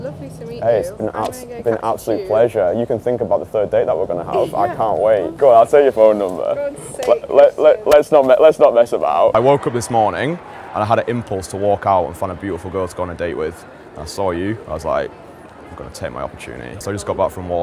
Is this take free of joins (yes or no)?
no